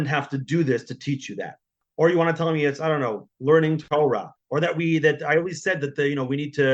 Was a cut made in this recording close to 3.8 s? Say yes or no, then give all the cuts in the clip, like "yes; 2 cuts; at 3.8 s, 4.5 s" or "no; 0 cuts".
yes; 2 cuts; at 1.8 s, 3.8 s